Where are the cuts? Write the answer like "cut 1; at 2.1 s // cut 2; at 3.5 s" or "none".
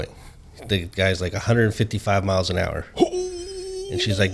none